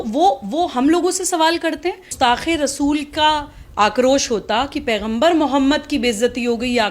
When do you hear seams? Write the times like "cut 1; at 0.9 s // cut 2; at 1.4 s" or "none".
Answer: cut 1; at 2.1 s